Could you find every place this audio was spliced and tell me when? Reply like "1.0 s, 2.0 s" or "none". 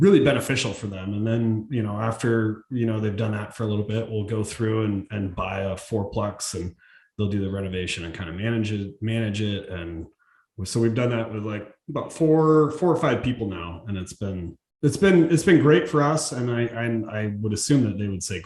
none